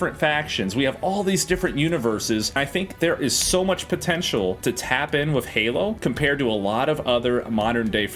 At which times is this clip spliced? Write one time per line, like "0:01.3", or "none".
0:02.6